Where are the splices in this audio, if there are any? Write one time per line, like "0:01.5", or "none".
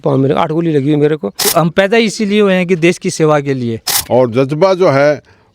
0:01.4
0:03.9